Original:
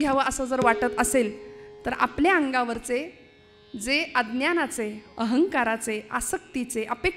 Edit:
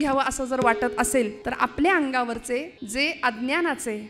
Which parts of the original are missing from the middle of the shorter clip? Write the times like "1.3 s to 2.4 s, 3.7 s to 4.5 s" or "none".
1.4 s to 1.8 s, 3.2 s to 3.7 s